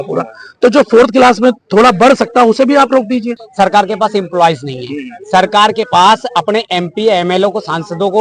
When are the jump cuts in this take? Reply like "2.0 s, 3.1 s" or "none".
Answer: 3.4 s